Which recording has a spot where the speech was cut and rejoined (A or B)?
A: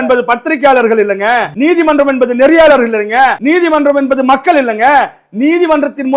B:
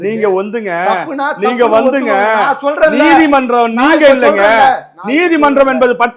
A